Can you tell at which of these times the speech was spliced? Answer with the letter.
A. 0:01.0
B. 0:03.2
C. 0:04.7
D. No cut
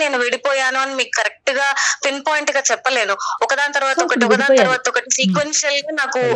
D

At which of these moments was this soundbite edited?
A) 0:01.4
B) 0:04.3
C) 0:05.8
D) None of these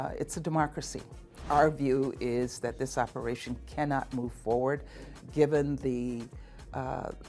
A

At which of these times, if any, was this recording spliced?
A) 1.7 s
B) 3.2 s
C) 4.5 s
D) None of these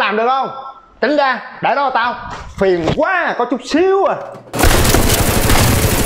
C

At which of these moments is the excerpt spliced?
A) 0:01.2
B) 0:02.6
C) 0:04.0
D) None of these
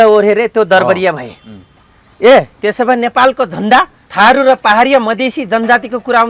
C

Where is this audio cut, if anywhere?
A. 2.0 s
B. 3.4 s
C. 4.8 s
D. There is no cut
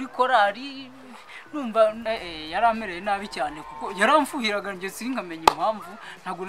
A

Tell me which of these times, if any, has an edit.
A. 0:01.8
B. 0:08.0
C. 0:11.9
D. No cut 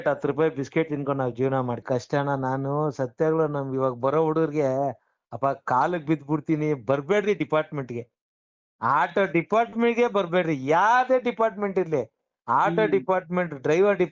A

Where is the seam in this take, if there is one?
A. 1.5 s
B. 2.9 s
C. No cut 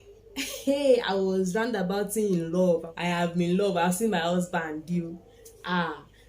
B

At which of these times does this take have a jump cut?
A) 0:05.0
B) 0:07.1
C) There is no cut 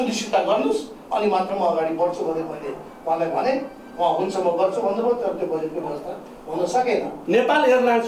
B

